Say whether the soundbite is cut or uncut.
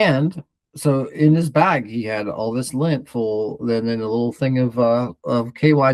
uncut